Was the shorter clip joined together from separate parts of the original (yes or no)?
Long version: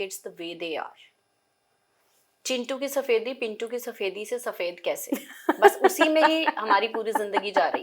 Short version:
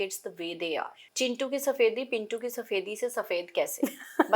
yes